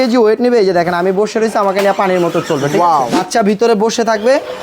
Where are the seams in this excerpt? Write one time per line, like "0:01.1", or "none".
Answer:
0:03.2